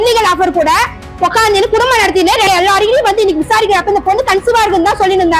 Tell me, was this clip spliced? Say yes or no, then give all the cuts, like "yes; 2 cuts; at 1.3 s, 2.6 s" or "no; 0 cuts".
yes; 1 cut; at 2.5 s